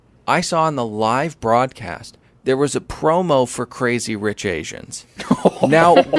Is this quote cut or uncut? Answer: uncut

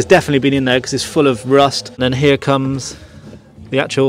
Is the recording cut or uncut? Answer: cut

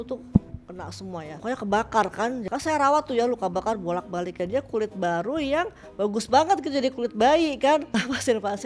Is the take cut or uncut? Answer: cut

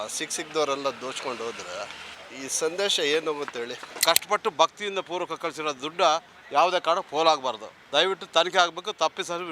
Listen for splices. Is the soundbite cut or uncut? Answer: cut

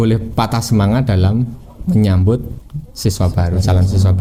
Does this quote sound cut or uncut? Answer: uncut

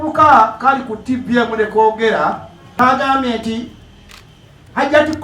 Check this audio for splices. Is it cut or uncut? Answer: cut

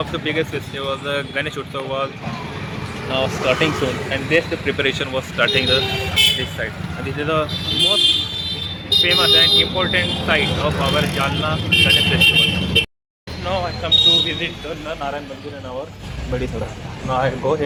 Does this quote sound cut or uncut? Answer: uncut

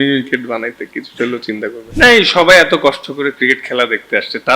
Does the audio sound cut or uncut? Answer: cut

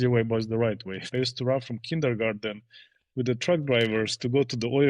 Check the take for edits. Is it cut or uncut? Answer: cut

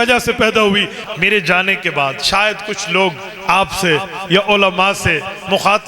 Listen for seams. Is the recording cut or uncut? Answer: cut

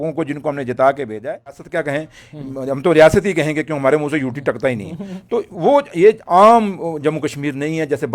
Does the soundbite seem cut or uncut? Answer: cut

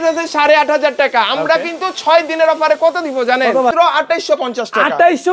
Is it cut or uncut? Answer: cut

